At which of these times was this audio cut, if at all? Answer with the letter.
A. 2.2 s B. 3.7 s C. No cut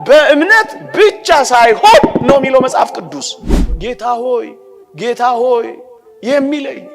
B